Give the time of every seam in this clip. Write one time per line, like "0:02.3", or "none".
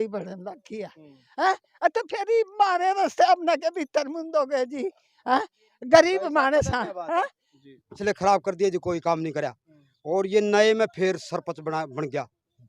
0:07.9